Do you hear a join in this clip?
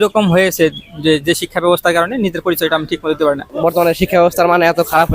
yes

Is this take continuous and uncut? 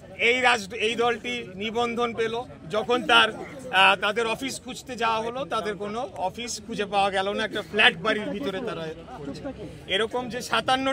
yes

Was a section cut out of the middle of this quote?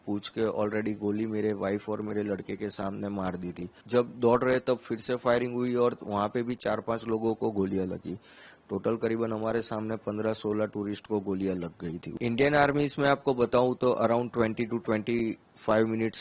yes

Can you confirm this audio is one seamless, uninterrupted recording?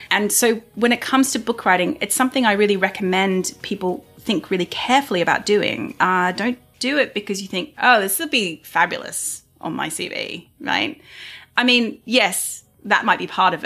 yes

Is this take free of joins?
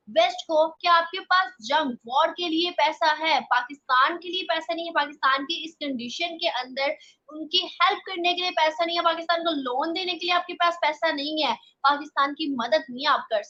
yes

